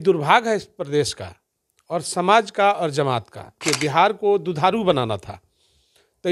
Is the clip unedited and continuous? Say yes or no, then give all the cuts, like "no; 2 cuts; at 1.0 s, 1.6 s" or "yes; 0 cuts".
no; 1 cut; at 3.6 s